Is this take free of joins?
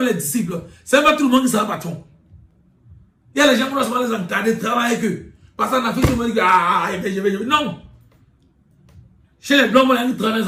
yes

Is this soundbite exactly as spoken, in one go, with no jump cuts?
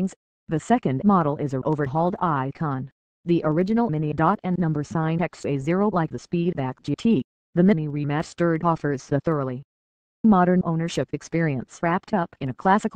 no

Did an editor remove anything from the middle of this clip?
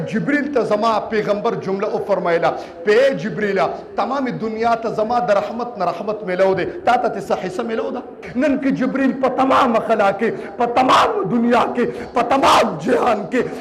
yes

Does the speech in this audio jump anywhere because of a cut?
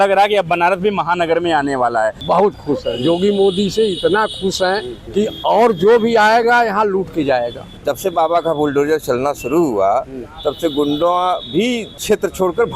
yes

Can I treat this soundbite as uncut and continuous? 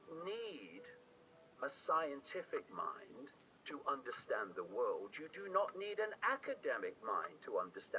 yes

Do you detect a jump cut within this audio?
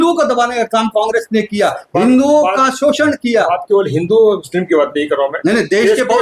no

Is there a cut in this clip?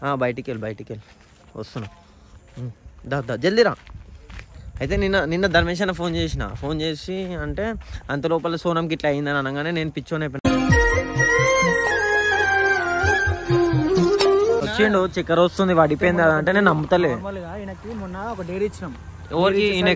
yes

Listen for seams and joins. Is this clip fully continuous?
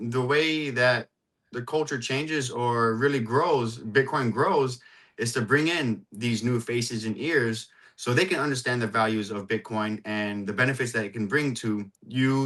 yes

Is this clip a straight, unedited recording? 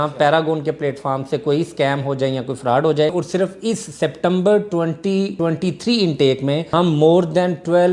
no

